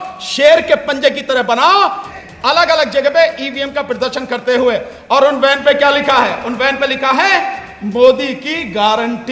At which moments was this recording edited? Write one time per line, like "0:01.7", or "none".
0:02.1